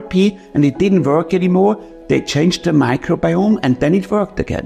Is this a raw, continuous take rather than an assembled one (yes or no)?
no